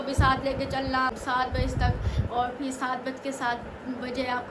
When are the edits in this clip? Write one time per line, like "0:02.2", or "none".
0:01.1

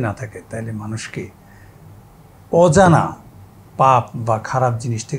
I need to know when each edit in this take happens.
none

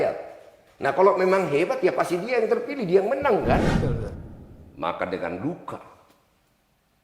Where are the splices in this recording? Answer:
0:04.1

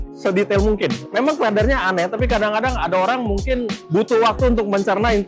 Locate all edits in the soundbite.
0:03.8

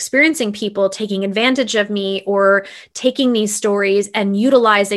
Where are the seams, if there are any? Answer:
none

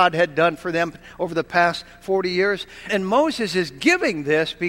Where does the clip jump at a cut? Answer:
0:02.9

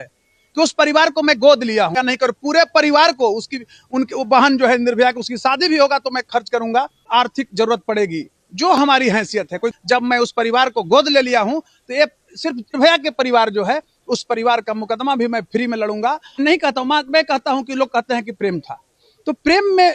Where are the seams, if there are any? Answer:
0:02.0
0:07.0
0:09.7
0:12.8
0:16.3

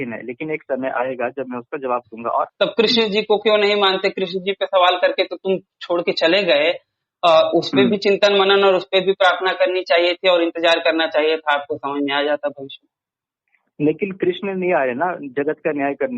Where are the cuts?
0:02.5

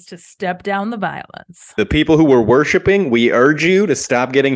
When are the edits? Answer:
0:01.8

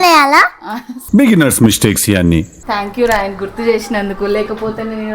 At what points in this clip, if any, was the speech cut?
0:02.6

